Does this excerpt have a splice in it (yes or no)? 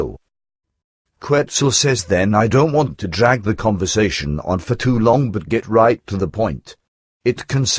yes